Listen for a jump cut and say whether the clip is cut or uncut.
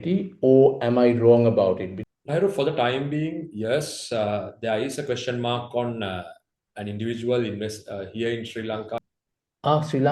cut